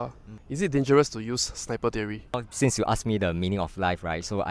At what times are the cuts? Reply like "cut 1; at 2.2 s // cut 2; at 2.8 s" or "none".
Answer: cut 1; at 2.3 s